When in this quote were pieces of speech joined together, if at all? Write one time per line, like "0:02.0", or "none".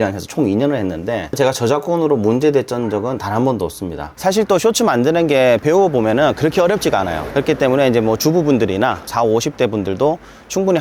0:01.3
0:04.1